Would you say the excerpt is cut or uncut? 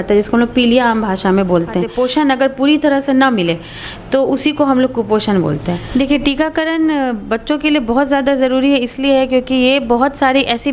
cut